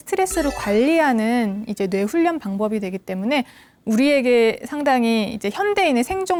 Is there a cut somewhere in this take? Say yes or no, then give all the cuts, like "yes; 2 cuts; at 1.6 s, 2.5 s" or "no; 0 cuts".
no; 0 cuts